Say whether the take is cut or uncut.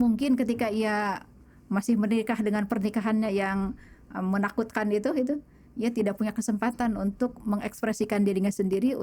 uncut